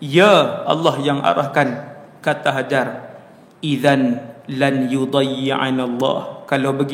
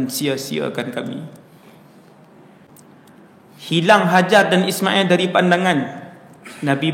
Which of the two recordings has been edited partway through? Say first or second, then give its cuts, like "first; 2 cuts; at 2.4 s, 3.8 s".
second; 1 cut; at 2.7 s